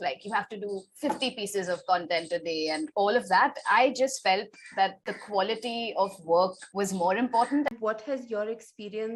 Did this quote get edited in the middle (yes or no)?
yes